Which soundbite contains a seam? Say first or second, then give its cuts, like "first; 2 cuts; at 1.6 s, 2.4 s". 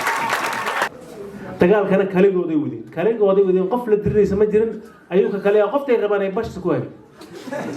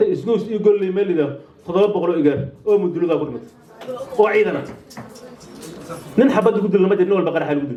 first; 1 cut; at 0.9 s